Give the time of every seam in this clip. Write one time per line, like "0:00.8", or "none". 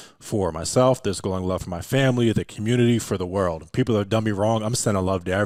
none